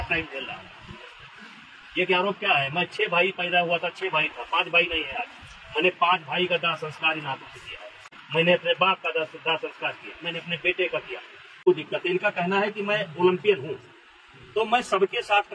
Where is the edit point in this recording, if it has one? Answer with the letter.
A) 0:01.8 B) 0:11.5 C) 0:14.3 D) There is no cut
B